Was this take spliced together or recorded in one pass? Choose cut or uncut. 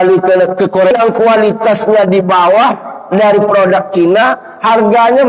cut